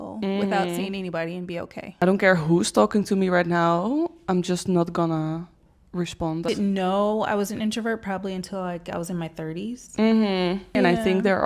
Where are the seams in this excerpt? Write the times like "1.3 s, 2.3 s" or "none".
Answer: 2.0 s, 6.5 s, 10.8 s